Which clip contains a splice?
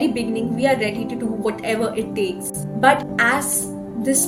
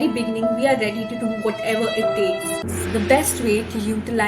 second; 1 cut; at 2.6 s

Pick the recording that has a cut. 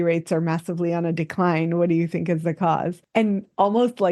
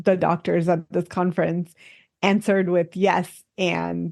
first; 1 cut; at 3.0 s

